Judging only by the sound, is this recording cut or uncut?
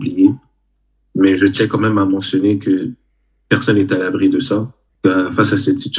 cut